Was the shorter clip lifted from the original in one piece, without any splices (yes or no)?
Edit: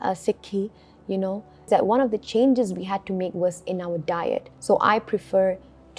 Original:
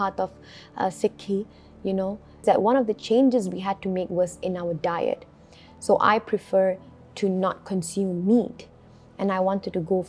no